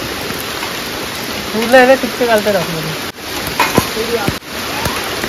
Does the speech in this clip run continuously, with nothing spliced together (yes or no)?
no